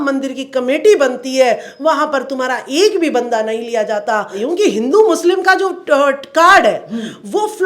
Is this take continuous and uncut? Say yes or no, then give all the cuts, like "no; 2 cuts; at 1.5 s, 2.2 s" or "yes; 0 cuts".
no; 1 cut; at 4.4 s